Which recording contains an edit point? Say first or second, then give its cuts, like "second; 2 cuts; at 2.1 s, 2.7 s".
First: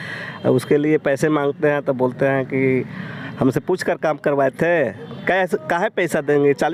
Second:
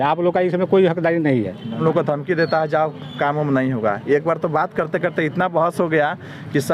second; 1 cut; at 1.8 s